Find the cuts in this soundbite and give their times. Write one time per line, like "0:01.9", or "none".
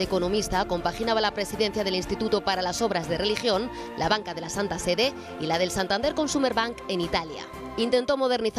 0:07.2